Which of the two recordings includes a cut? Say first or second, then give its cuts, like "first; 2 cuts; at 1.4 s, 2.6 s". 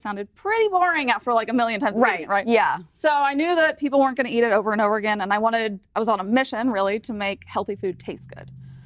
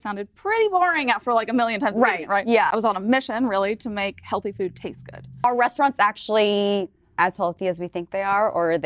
second; 2 cuts; at 2.7 s, 5.4 s